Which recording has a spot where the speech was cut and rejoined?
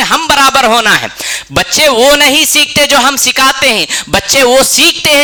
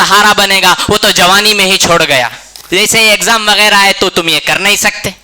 second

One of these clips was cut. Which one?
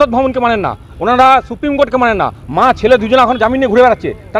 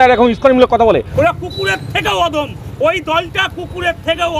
second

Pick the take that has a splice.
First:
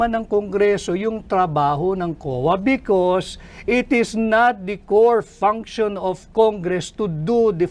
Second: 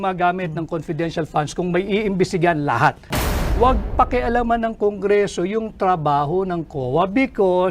second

